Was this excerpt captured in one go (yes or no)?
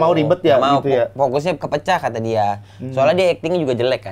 yes